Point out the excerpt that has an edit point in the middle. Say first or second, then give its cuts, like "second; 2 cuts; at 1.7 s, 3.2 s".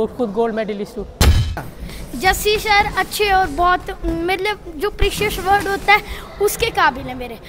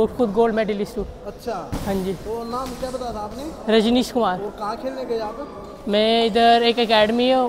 first; 1 cut; at 1.5 s